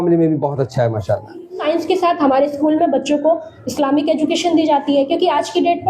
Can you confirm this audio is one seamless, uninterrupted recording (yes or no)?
no